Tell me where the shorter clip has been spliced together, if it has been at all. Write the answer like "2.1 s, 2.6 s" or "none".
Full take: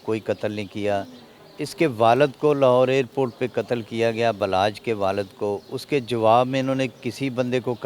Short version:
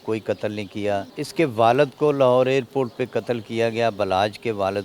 1.2 s